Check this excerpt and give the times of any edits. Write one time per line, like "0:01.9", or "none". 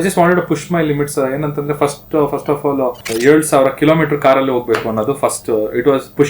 0:03.0